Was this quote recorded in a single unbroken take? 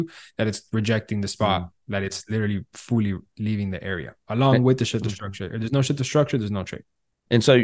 yes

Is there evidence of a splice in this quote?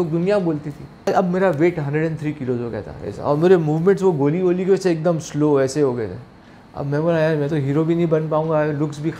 yes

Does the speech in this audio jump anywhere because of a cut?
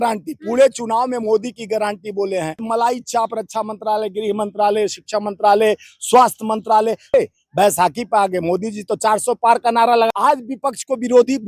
yes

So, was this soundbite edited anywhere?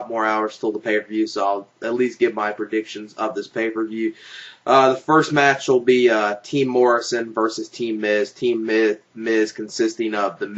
yes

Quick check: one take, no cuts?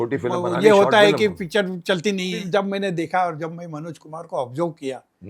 no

